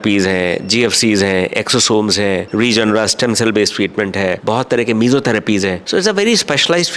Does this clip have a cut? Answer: no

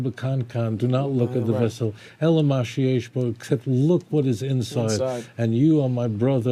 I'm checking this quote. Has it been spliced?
no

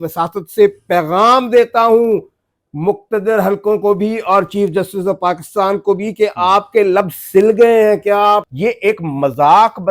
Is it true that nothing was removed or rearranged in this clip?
no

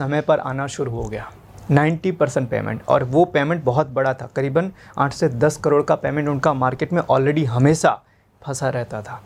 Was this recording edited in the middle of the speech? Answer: no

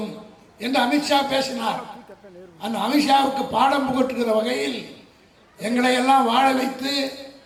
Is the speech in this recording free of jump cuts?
yes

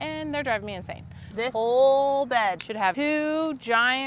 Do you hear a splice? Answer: yes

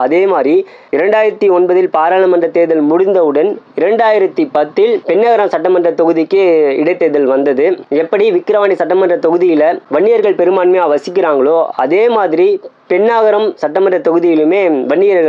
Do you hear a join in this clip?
no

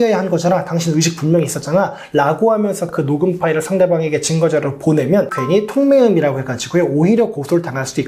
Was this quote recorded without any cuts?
no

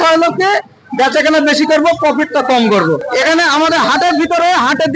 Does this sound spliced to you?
yes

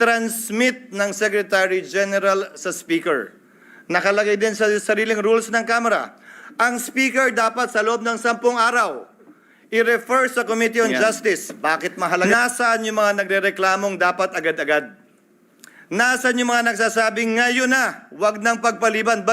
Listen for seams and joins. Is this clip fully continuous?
no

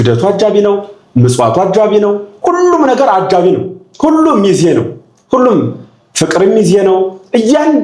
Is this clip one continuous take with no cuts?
yes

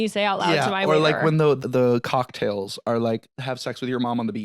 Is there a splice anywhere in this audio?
yes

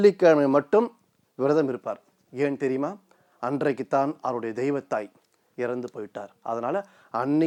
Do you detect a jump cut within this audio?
no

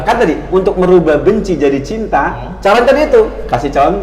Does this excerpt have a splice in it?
yes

